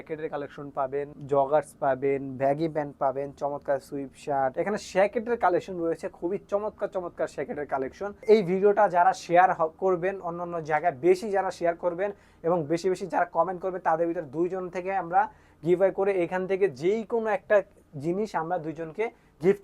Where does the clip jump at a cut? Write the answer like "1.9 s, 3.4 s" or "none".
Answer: 1.2 s, 4.5 s, 8.2 s